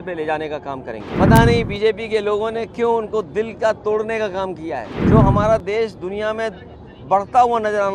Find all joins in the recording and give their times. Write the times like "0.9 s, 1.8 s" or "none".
1.1 s, 4.9 s